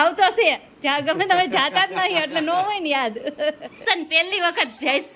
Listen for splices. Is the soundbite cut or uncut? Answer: cut